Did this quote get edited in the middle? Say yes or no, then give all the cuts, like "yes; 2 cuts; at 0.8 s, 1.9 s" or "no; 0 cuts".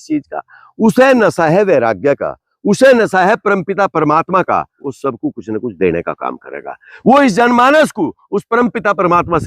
yes; 1 cut; at 4.8 s